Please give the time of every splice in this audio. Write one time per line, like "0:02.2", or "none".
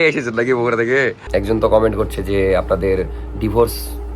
0:01.2